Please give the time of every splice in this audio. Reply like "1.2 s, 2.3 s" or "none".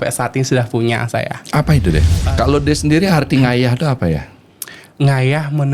2.2 s